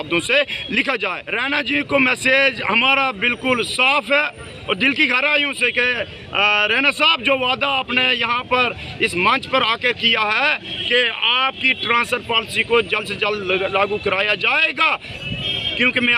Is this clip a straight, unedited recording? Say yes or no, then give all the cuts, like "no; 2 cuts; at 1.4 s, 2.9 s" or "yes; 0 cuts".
no; 1 cut; at 1.3 s